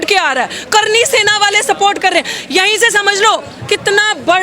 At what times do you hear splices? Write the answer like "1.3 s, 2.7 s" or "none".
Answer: none